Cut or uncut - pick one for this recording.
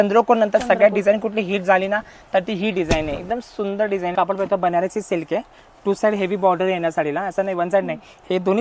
cut